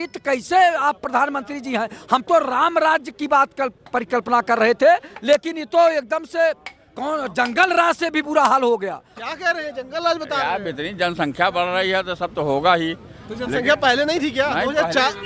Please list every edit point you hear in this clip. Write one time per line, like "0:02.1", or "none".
none